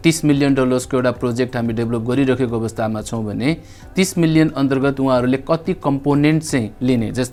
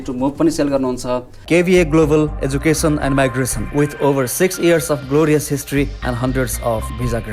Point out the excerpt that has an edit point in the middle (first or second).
second